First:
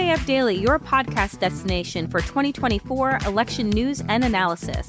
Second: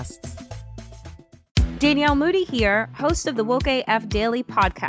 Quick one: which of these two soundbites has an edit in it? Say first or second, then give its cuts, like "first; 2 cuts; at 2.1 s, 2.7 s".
second; 1 cut; at 1.3 s